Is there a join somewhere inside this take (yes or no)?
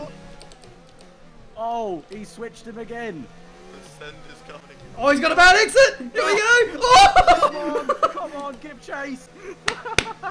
yes